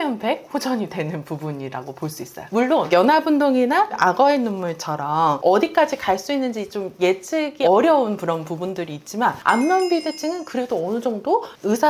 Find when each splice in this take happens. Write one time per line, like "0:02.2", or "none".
none